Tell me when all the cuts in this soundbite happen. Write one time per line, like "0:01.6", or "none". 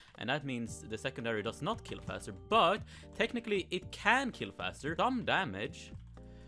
0:04.9